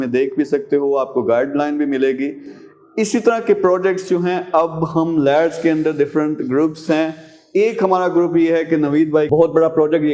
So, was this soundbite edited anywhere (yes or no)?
no